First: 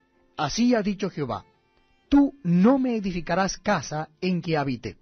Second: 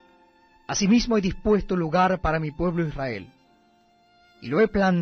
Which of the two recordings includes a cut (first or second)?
first